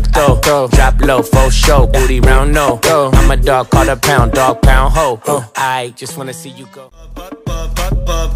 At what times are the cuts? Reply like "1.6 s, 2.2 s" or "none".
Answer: 6.7 s